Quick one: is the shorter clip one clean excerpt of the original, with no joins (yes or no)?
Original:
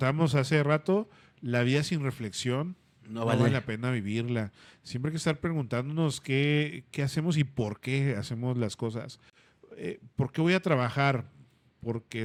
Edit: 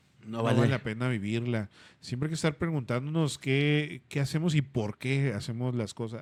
yes